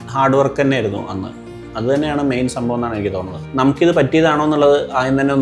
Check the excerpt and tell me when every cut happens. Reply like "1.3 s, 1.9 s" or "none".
3.4 s